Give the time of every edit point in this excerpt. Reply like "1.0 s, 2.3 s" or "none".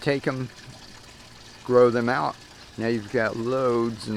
2.1 s